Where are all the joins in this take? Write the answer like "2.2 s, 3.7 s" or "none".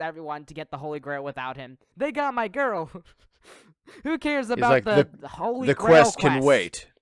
1.8 s